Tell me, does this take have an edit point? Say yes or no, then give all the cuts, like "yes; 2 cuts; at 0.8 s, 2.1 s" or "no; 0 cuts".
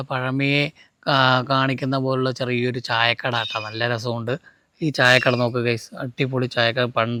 no; 0 cuts